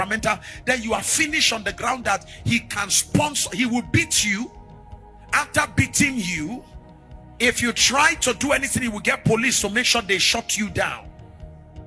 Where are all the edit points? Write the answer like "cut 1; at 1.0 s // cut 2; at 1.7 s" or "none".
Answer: none